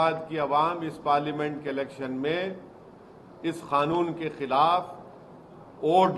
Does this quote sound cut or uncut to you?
uncut